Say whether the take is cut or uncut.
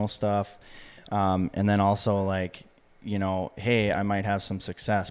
uncut